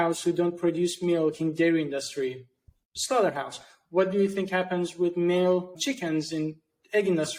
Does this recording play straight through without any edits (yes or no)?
yes